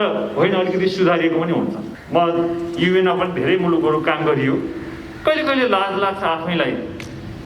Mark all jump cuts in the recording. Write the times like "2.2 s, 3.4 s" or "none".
1.9 s